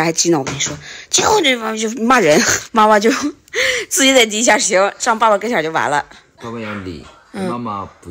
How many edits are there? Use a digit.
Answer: 2